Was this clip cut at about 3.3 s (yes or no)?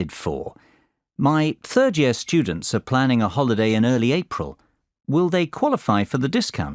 yes